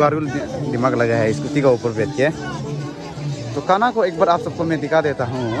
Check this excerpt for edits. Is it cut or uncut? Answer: uncut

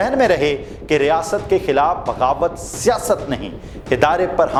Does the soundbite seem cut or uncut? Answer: uncut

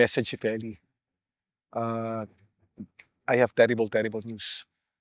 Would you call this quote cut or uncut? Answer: uncut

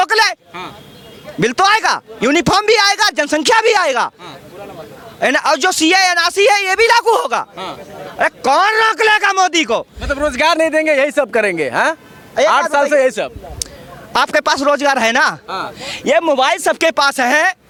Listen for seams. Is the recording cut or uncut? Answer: uncut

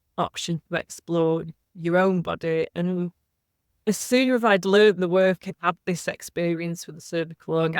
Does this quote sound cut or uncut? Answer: cut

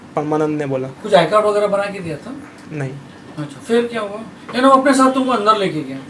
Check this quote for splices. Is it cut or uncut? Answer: uncut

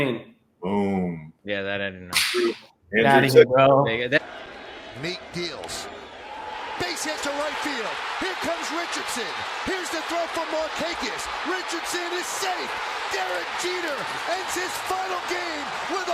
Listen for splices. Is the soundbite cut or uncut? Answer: uncut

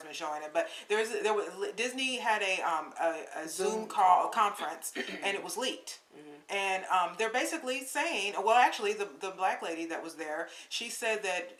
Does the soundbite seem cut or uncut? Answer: uncut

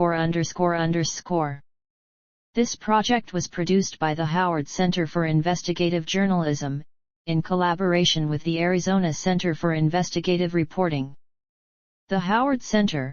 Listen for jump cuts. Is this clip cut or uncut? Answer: cut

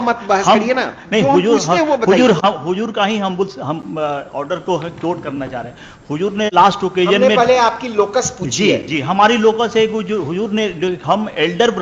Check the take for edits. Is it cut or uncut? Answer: uncut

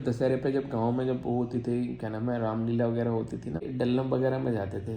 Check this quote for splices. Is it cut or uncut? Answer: cut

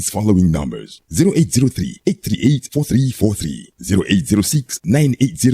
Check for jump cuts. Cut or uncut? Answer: cut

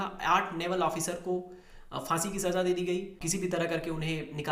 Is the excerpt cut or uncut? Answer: cut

